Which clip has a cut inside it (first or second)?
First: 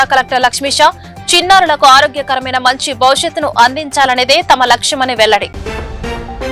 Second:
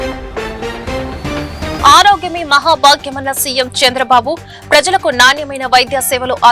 second